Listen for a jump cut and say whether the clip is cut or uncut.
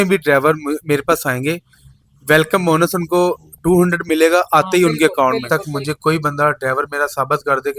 cut